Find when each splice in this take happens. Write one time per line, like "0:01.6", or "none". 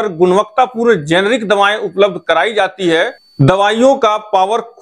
0:03.2